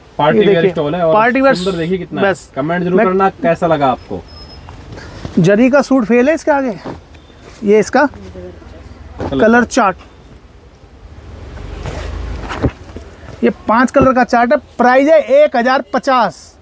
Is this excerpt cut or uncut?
uncut